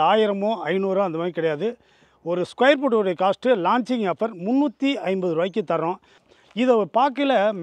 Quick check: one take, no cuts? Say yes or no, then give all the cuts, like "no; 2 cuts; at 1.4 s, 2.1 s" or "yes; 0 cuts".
no; 1 cut; at 6.2 s